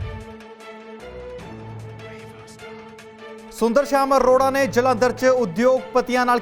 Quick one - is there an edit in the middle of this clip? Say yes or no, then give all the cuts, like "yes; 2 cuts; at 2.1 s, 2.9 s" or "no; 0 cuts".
yes; 1 cut; at 2.9 s